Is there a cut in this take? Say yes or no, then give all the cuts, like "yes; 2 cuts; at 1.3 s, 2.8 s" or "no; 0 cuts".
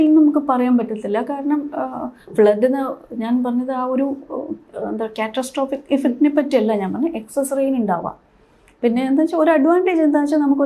no; 0 cuts